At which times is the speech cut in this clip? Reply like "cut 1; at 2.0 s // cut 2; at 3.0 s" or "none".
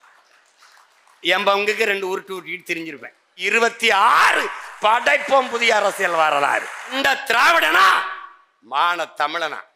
cut 1; at 3.3 s // cut 2; at 6.9 s